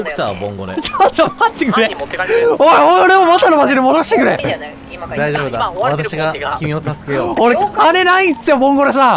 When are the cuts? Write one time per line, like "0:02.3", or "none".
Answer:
none